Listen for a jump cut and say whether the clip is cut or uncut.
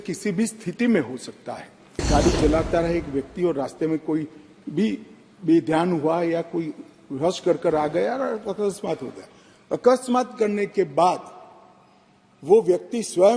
cut